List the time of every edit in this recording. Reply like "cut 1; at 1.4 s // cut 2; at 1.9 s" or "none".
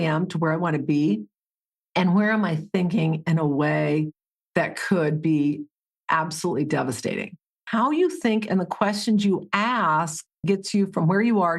cut 1; at 7.6 s